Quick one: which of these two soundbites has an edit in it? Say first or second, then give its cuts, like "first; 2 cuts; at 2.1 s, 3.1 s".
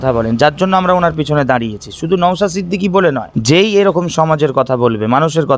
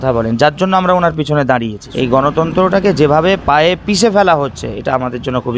second; 1 cut; at 1.9 s